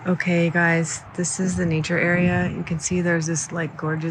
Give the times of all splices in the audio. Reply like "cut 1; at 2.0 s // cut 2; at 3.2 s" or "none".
none